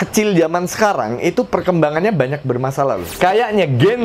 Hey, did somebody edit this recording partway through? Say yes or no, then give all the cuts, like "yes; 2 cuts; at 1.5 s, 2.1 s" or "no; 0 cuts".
yes; 1 cut; at 3.1 s